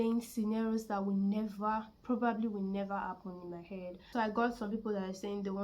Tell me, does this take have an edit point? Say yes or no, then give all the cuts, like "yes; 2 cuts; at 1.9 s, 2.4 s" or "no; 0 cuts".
yes; 1 cut; at 4.0 s